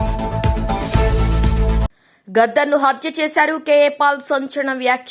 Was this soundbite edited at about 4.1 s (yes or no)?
no